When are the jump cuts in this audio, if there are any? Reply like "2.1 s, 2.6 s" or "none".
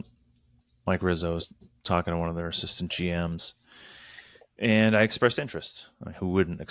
none